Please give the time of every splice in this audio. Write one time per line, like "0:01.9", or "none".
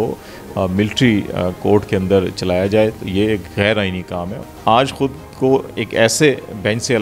0:04.4